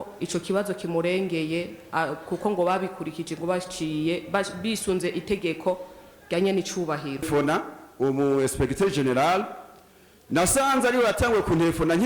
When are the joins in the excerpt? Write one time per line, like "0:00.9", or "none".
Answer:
0:07.3